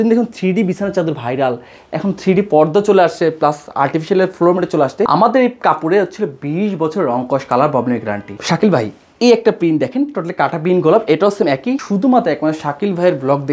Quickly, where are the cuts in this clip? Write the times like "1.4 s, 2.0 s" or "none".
5.1 s, 8.3 s, 11.8 s